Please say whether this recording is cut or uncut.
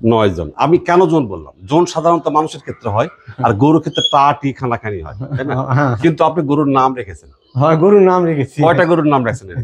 uncut